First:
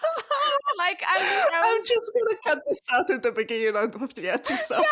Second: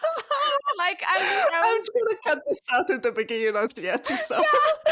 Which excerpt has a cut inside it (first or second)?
second